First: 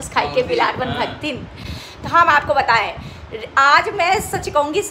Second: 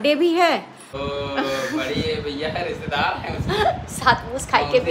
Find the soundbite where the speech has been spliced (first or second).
second